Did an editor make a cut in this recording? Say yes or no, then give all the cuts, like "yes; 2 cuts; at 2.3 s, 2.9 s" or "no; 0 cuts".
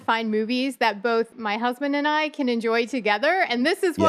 yes; 1 cut; at 1.4 s